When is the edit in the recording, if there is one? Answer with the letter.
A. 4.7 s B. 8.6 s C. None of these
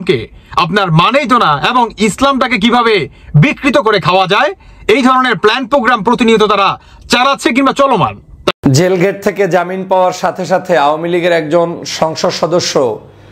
B